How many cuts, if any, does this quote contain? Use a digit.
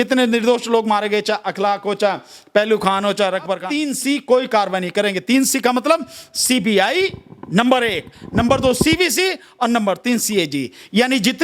1